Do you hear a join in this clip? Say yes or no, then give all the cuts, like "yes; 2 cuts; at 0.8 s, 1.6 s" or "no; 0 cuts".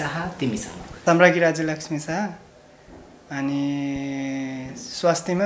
yes; 1 cut; at 1.0 s